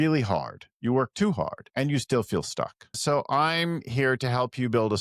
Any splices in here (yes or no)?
yes